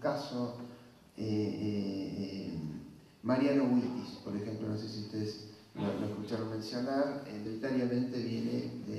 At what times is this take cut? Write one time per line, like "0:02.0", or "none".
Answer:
none